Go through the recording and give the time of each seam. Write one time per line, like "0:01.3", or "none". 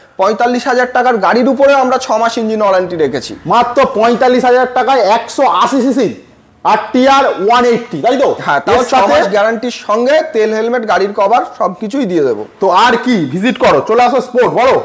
none